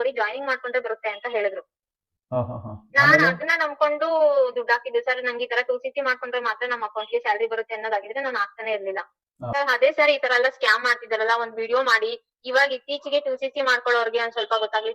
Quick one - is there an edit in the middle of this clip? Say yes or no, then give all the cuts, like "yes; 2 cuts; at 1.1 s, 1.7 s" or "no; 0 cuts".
yes; 1 cut; at 9.5 s